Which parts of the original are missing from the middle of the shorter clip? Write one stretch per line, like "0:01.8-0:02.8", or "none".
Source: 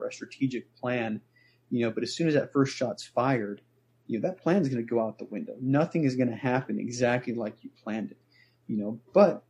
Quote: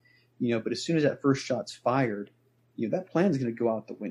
none